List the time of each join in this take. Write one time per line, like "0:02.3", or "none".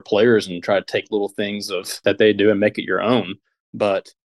0:02.0